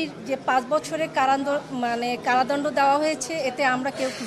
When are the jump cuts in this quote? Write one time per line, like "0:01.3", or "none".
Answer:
none

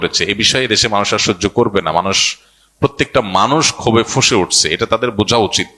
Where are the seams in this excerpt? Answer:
none

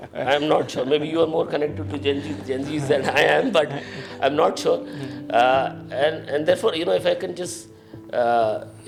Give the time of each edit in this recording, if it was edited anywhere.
none

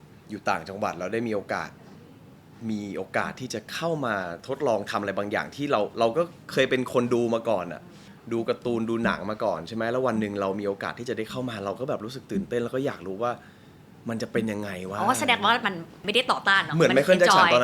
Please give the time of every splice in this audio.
none

